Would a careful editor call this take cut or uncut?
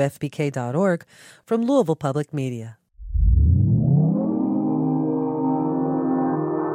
cut